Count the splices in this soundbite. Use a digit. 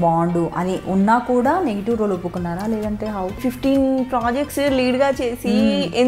1